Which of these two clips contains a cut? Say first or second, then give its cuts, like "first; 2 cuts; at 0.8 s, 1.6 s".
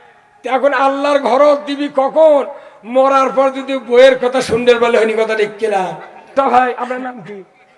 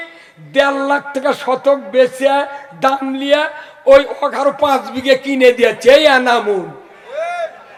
first; 1 cut; at 6.3 s